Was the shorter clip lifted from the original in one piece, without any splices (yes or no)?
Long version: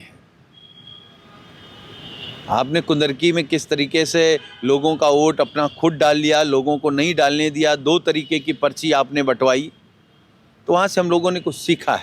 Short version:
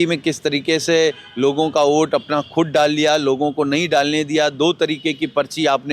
yes